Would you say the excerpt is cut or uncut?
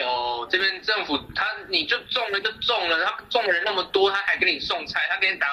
uncut